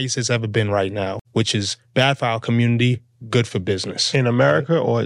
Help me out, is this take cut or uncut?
cut